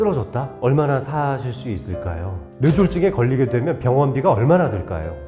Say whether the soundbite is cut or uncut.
cut